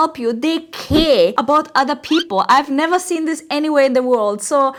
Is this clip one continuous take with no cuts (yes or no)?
yes